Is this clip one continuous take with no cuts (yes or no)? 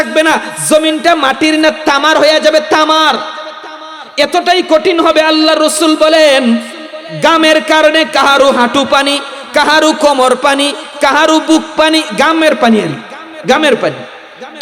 yes